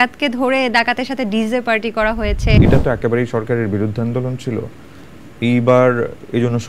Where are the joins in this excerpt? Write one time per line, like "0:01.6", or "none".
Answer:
0:02.6